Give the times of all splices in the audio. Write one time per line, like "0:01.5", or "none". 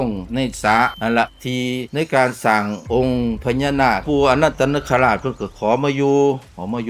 0:00.9
0:04.0